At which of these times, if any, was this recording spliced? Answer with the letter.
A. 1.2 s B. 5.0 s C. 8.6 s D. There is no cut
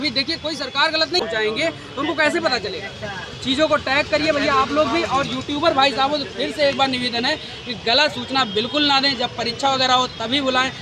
A